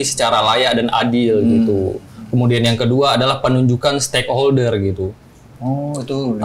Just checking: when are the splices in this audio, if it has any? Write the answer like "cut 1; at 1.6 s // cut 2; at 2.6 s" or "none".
none